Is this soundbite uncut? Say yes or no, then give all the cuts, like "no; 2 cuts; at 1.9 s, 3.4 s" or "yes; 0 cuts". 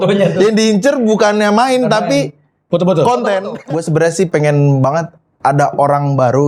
no; 1 cut; at 3.5 s